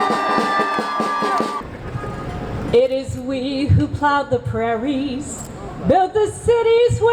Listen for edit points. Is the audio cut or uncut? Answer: cut